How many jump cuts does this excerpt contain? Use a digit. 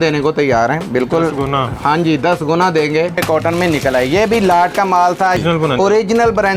2